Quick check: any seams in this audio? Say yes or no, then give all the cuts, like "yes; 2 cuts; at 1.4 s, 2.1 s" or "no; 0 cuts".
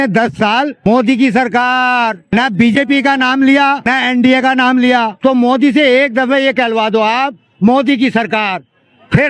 yes; 4 cuts; at 0.9 s, 2.2 s, 3.9 s, 5.1 s